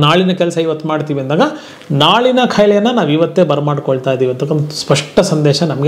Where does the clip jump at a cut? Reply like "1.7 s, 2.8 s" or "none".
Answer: none